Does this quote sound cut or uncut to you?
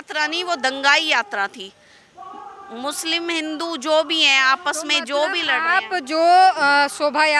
uncut